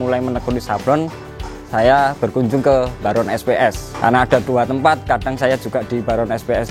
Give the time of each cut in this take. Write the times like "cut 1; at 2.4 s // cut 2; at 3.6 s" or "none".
none